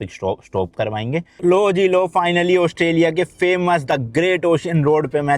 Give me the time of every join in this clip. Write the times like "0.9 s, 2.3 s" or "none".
1.3 s